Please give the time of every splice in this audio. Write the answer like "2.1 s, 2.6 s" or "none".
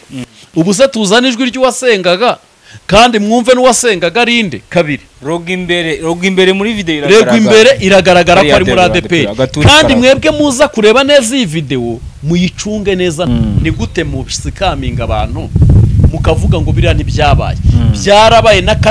13.3 s